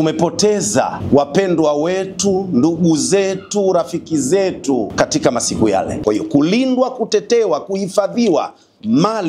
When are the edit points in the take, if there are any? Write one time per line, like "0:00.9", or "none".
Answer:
0:01.0
0:04.9
0:06.0